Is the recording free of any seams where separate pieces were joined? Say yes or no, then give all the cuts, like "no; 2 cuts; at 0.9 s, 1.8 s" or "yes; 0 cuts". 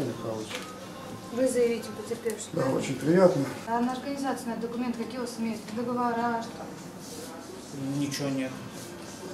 no; 1 cut; at 3.6 s